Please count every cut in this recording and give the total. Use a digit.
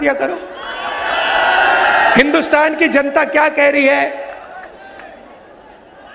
0